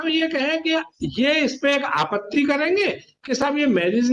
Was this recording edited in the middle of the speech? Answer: no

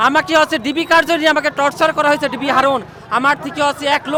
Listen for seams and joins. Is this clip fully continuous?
yes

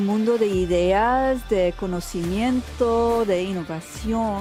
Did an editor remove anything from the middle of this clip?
no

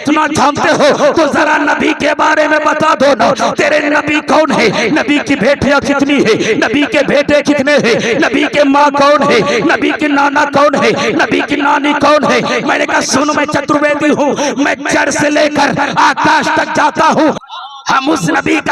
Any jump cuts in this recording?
yes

